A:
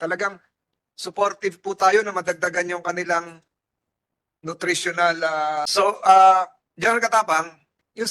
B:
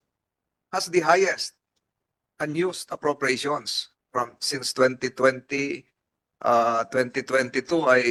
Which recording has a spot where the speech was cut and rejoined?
A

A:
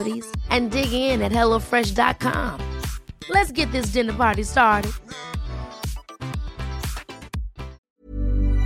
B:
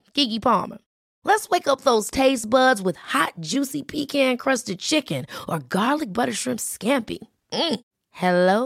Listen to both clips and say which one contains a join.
A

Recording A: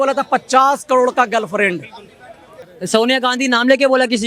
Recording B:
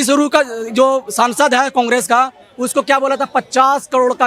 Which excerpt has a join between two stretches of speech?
A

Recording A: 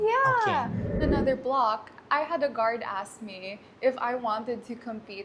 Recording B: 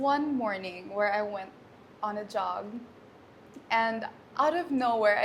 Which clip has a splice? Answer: A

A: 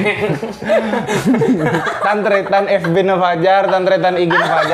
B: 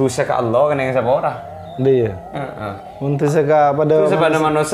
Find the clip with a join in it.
A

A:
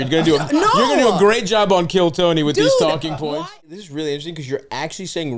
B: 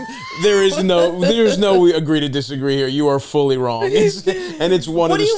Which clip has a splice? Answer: A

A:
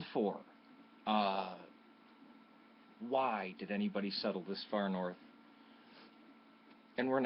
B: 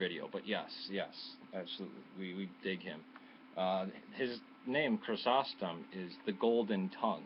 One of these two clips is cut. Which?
A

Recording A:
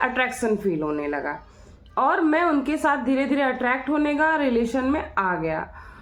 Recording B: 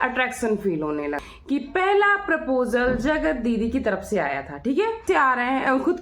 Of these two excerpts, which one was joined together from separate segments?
B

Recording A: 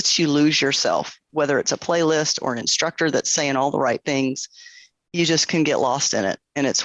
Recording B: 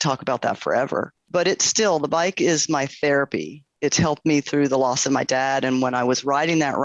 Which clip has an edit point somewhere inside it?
B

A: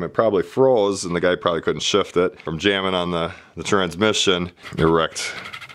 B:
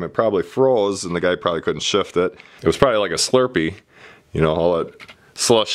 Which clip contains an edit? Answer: A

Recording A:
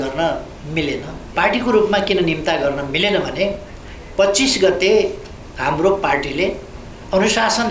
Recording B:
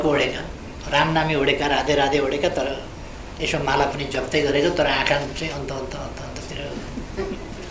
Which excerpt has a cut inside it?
A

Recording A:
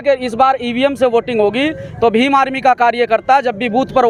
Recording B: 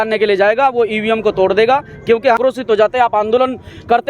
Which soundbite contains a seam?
B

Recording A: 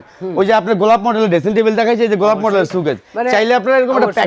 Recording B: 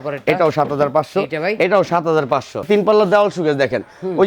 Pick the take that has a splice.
B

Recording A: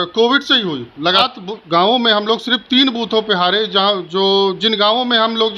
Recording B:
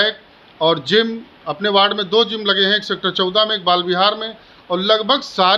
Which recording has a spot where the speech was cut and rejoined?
A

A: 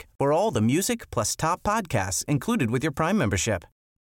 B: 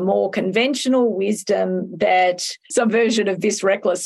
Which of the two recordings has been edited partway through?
B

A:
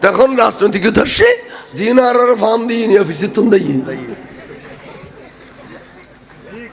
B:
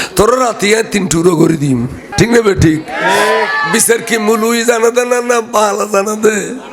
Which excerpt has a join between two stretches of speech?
B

